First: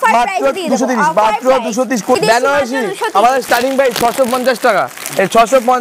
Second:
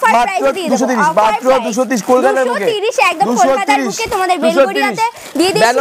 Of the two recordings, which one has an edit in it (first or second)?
first